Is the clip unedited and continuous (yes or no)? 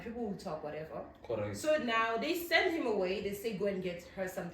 yes